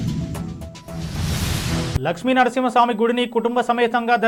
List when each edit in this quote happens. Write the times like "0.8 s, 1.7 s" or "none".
none